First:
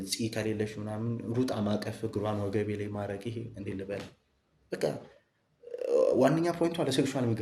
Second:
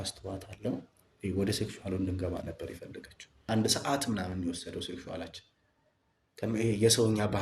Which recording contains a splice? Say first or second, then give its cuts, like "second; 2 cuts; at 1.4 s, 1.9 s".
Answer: second; 1 cut; at 3.4 s